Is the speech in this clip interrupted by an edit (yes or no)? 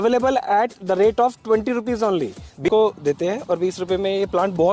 yes